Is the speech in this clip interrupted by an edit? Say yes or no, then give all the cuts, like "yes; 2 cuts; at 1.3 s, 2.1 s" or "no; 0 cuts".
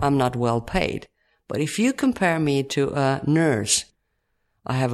yes; 1 cut; at 3.8 s